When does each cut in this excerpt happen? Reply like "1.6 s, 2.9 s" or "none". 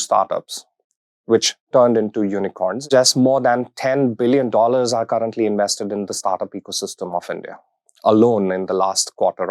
2.8 s